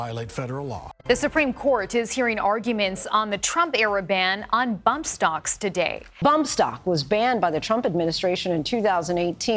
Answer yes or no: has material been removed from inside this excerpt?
yes